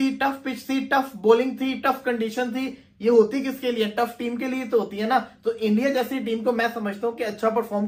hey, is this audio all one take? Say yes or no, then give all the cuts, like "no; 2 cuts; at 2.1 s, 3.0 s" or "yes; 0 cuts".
yes; 0 cuts